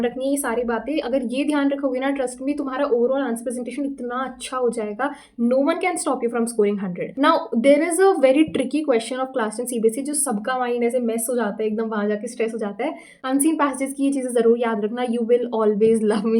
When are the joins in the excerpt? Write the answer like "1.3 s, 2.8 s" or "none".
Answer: 7.0 s, 13.1 s